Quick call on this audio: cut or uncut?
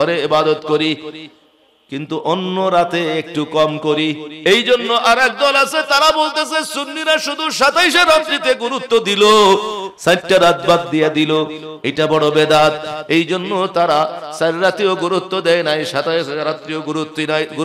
cut